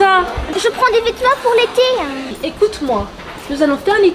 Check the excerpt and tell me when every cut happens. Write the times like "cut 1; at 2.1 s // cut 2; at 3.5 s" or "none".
cut 1; at 2.3 s